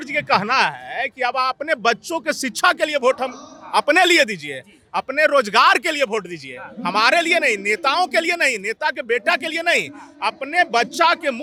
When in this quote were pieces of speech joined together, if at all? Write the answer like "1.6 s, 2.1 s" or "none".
none

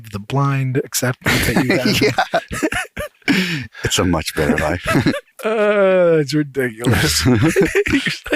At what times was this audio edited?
5.3 s

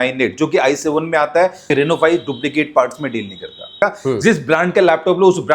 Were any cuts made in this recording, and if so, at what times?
1.7 s, 3.8 s

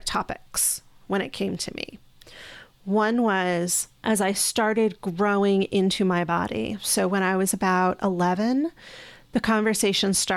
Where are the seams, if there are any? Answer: 4.0 s

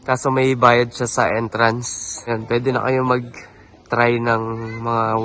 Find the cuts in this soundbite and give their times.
2.3 s

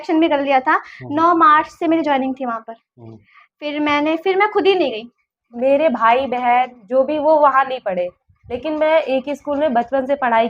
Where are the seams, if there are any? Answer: 5.4 s

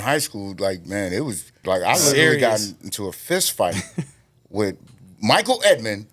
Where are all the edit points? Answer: 1.6 s

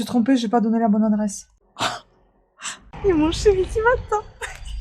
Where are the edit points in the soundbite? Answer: 2.9 s

